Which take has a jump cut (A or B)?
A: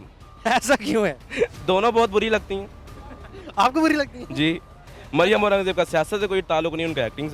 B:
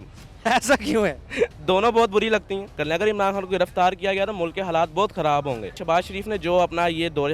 B